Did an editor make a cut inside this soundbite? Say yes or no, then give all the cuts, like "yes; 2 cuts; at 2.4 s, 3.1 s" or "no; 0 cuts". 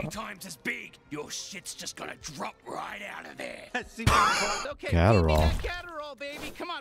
yes; 1 cut; at 4.6 s